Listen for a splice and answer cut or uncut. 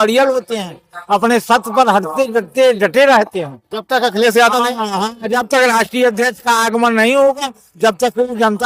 uncut